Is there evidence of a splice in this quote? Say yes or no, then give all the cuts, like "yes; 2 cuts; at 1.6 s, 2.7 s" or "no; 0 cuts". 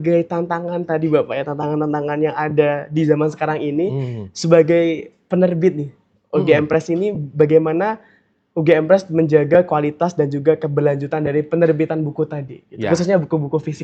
no; 0 cuts